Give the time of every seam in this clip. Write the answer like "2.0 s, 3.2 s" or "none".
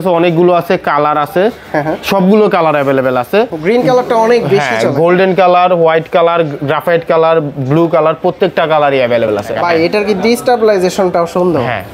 9.5 s

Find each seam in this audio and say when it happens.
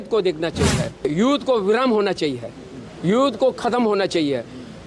1.1 s

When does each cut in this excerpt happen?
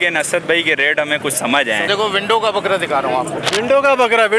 1.9 s

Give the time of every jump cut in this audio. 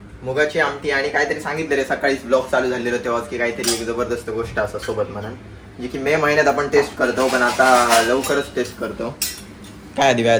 none

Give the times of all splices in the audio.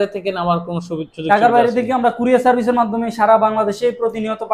none

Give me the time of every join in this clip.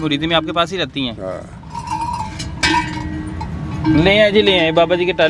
none

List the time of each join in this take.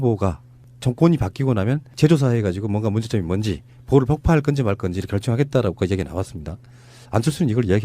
3.8 s

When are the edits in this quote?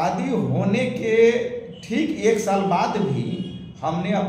none

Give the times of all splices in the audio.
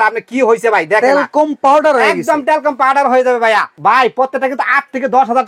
3.7 s

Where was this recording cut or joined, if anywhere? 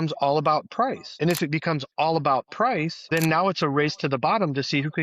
1.0 s, 3.0 s

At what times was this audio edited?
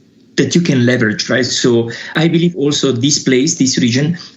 2.1 s

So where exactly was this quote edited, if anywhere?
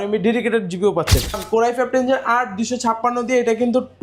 1.4 s

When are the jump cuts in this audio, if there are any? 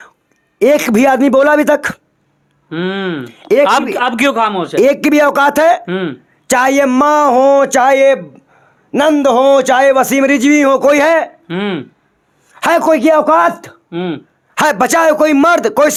none

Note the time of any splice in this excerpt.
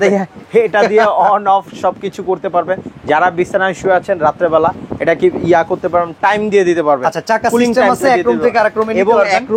none

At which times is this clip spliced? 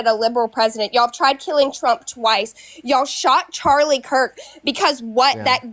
none

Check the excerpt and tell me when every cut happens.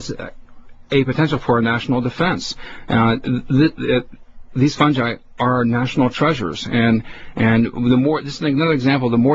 3.1 s

